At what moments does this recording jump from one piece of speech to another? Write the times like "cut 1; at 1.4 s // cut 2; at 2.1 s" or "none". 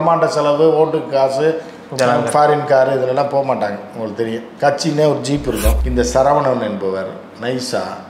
cut 1; at 5.8 s